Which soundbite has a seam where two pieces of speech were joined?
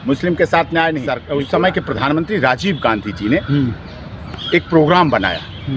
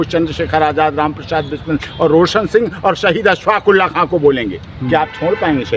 first; 1 cut; at 1.1 s

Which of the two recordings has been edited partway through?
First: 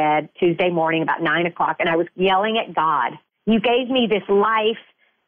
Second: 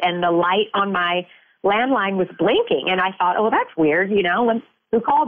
first; 2 cuts; at 2.1 s, 3.2 s

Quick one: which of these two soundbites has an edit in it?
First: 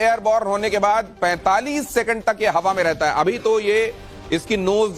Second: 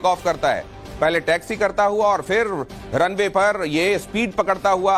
first; 1 cut; at 2.2 s

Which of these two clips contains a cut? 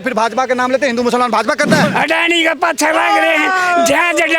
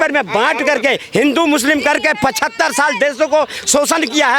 first; 1 cut; at 1.9 s

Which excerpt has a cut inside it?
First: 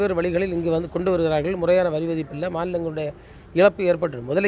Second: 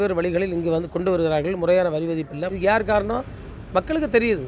second; 1 cut; at 2.5 s

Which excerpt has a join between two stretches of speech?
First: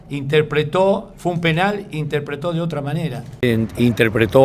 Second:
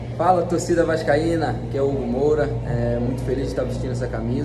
first; 1 cut; at 3.2 s

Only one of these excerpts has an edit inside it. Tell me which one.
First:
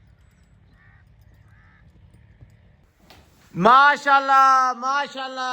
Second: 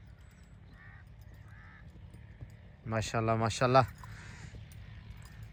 first; 1 cut; at 2.8 s

